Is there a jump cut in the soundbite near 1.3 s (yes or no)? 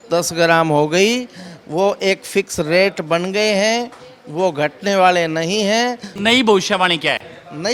no